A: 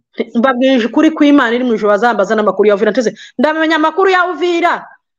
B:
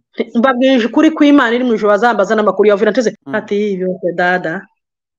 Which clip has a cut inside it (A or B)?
B